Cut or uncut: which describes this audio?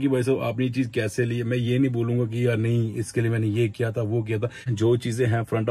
cut